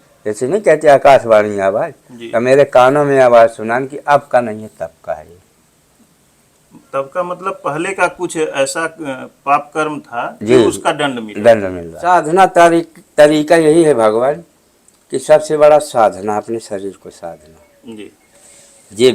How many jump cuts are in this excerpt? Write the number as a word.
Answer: one